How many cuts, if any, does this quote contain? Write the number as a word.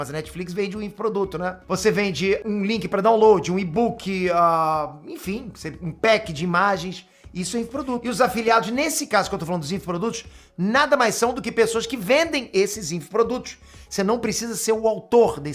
zero